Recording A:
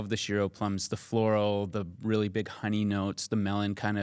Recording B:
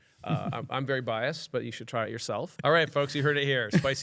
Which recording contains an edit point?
B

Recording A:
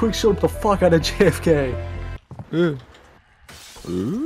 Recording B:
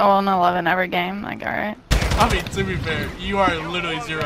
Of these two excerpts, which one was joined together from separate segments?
A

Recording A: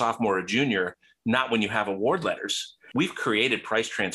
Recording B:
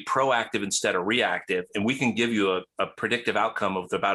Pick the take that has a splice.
A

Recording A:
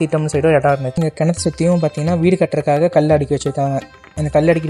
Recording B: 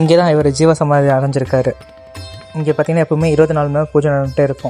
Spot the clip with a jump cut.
A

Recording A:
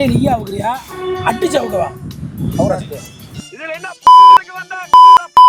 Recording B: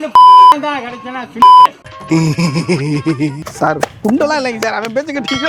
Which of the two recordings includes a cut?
B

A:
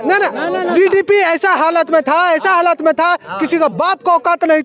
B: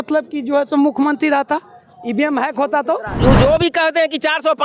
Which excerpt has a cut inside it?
B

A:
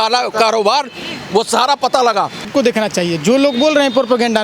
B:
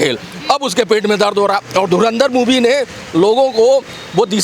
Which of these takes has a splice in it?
A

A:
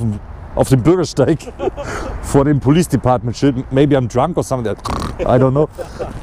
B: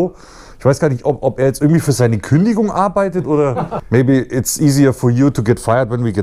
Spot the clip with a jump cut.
B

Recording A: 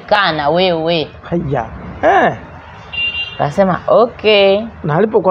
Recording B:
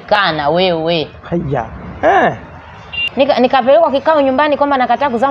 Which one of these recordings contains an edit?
B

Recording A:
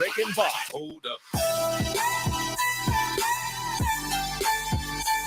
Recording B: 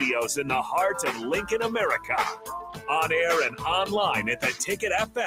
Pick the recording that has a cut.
A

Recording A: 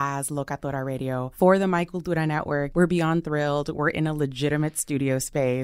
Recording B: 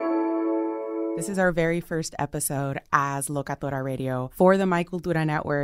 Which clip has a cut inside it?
B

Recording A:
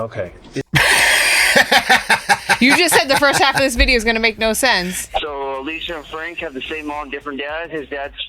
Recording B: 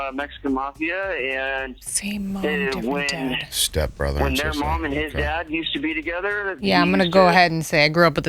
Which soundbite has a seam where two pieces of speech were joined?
A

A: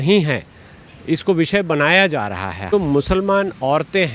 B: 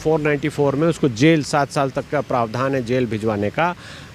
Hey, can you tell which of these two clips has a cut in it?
A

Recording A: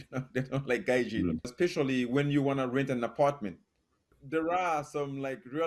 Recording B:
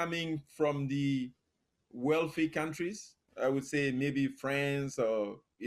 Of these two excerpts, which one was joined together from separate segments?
A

